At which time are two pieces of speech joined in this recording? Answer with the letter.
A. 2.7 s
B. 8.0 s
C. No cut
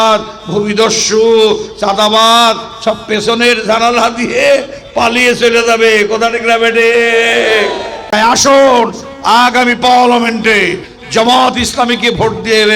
B